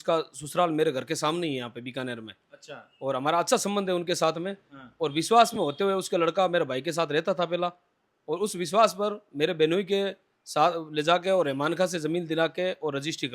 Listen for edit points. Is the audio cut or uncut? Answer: uncut